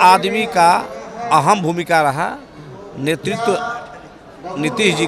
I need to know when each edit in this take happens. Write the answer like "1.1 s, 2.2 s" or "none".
none